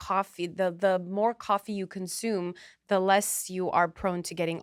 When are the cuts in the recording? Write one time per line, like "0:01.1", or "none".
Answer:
none